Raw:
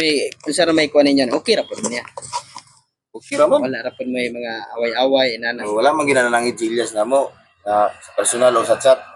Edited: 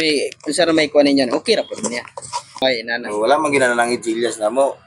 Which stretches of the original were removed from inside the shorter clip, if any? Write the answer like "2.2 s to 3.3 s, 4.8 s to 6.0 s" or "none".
2.6 s to 5.2 s